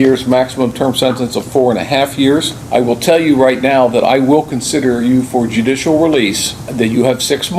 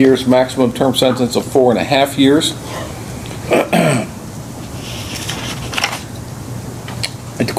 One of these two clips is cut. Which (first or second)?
first